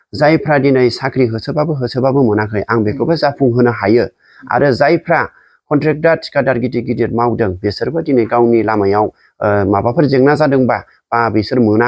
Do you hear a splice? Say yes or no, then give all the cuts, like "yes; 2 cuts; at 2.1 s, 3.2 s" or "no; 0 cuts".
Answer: no; 0 cuts